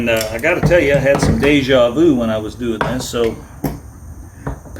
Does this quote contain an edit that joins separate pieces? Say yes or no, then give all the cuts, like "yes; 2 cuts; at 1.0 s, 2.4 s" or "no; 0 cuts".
no; 0 cuts